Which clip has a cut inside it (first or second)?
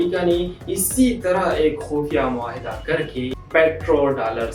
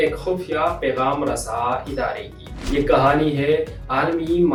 first